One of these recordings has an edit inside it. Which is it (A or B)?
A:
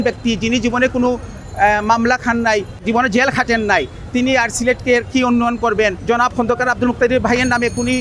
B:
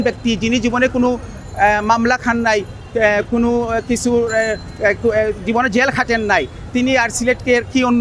A